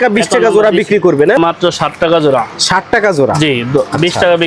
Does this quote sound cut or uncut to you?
cut